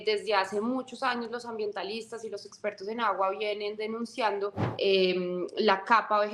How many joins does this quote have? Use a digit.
1